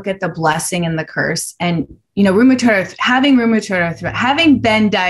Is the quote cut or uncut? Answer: uncut